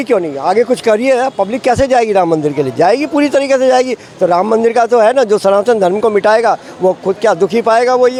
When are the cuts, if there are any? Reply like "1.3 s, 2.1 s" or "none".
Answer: none